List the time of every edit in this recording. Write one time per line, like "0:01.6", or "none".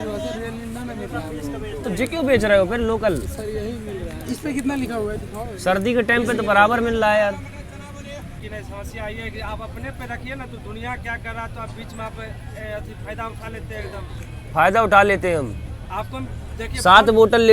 0:08.4